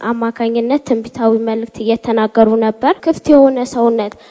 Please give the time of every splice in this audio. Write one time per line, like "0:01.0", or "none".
0:03.0